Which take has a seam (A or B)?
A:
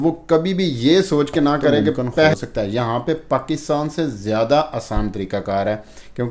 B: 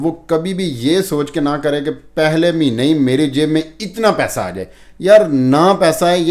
A